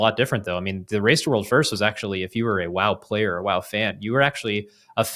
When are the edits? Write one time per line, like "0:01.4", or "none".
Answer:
none

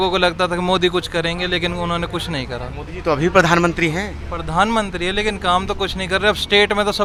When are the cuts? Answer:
none

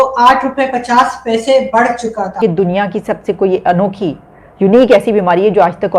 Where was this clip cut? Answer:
0:02.4

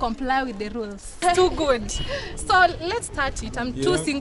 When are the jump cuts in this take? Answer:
0:01.2

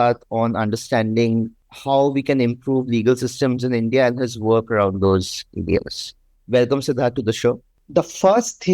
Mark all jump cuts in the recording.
0:01.6
0:07.8

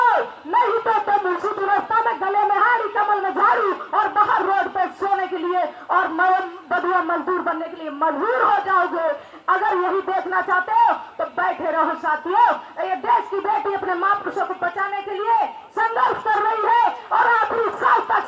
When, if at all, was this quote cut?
none

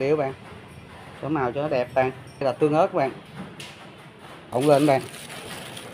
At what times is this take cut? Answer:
0:02.4
0:04.5

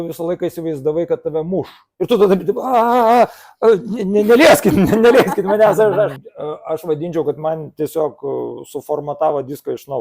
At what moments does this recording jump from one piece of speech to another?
0:01.8
0:06.2

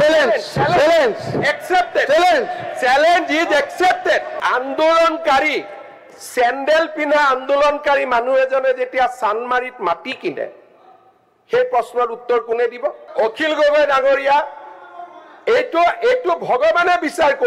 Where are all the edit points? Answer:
0:04.3
0:13.0

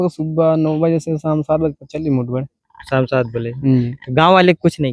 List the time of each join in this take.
none

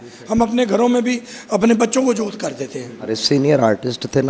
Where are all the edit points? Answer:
0:03.2

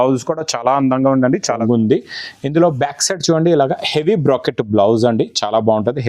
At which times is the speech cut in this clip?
0:01.5

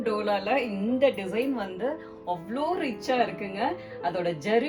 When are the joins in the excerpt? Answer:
none

